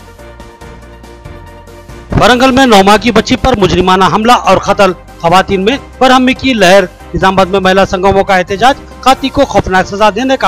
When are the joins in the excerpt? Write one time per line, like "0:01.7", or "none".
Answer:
0:01.1